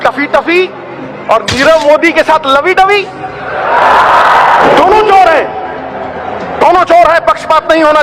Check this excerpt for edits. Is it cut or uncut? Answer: uncut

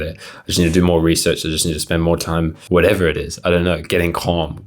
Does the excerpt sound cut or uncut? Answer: cut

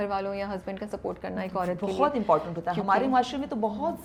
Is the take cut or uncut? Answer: uncut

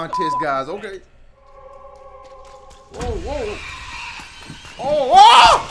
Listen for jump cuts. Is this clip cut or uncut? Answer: cut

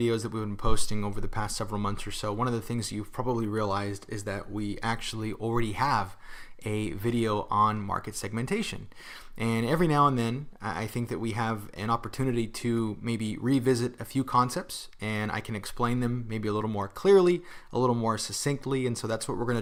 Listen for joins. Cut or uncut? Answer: uncut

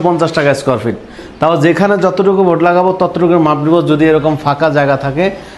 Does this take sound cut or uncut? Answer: uncut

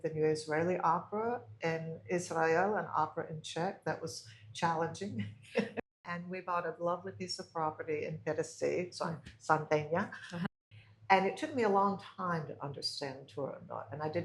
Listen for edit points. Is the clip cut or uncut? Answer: cut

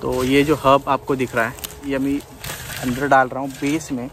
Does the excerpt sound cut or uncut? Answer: uncut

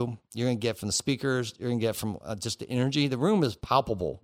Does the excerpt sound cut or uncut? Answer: uncut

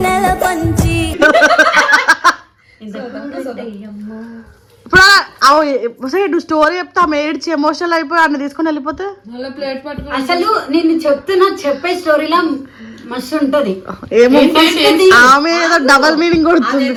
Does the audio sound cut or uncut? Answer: uncut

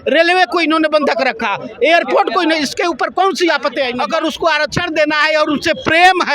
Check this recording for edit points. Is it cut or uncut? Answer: cut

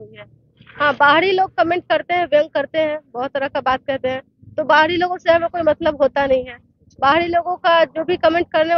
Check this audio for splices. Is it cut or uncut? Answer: uncut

